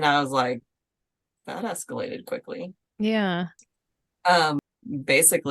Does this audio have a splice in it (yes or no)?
yes